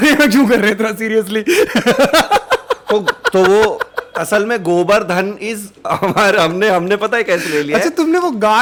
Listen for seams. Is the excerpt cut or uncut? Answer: uncut